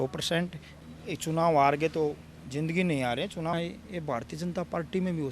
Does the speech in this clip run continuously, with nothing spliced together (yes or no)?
no